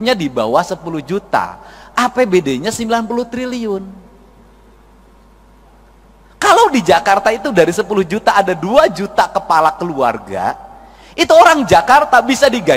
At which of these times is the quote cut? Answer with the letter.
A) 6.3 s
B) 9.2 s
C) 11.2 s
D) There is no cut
D